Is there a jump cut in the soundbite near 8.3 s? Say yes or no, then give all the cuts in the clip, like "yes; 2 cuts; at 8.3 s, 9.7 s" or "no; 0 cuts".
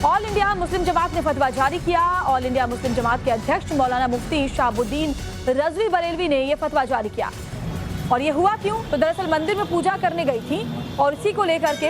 yes; 1 cut; at 8.3 s